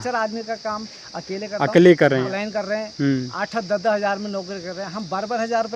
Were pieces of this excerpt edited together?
yes; 1 cut; at 2.4 s

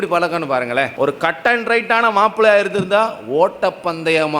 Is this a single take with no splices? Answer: no; 1 cut; at 0.9 s

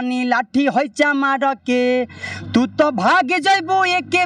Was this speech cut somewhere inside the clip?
no; 0 cuts

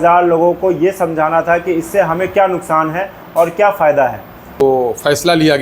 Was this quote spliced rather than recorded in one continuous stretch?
yes; 1 cut; at 4.6 s

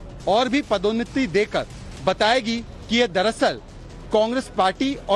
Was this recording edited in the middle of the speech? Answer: no; 0 cuts

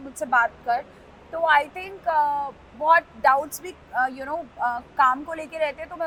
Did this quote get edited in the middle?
no; 0 cuts

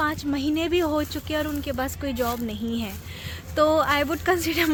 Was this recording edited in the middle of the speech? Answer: no; 0 cuts

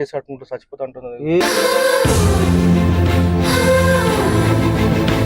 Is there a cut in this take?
yes; 1 cut; at 1.4 s

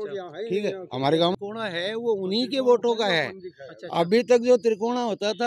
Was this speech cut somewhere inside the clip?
yes; 1 cut; at 1.3 s

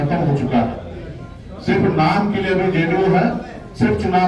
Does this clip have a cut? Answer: no; 0 cuts

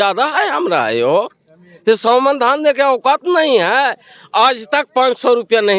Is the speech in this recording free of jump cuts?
yes; 0 cuts

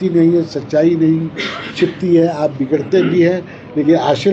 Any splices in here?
no; 0 cuts

